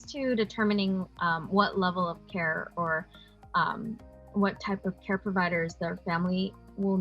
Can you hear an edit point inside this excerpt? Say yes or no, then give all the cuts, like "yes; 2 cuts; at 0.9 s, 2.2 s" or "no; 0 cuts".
no; 0 cuts